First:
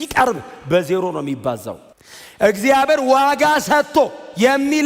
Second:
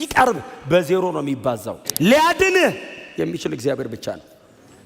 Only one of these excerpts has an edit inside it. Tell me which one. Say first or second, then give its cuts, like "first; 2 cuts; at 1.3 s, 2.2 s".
second; 1 cut; at 1.8 s